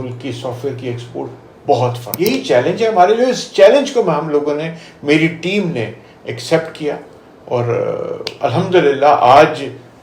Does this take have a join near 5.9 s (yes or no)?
no